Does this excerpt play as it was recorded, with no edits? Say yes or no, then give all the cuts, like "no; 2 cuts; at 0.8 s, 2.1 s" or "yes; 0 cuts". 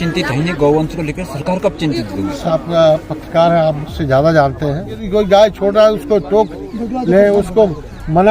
no; 2 cuts; at 2.5 s, 5.0 s